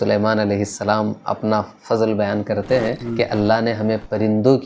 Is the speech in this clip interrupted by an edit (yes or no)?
yes